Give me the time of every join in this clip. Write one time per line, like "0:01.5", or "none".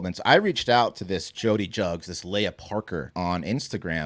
0:03.1